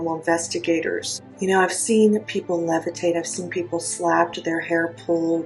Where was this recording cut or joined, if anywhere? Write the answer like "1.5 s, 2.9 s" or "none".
1.2 s